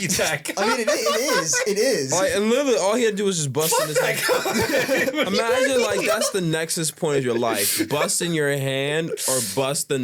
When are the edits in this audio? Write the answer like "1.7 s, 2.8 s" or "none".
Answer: none